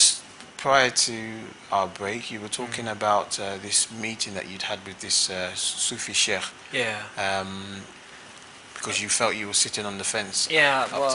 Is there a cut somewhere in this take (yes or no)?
yes